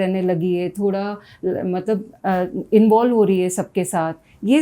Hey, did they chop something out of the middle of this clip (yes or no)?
no